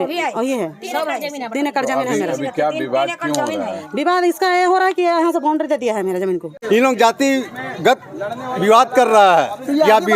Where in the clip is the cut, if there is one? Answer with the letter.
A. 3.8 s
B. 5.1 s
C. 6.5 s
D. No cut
C